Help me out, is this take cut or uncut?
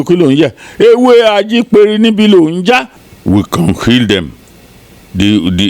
cut